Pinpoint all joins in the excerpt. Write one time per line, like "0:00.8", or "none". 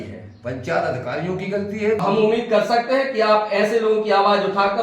0:02.0